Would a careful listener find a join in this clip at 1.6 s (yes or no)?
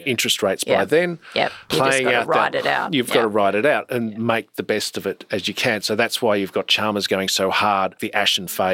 yes